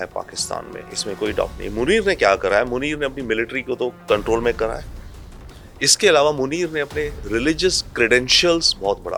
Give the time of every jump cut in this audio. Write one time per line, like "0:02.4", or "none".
none